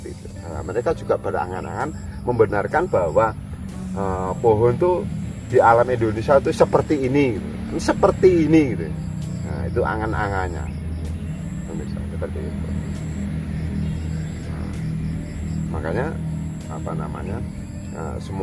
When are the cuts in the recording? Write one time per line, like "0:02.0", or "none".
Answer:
none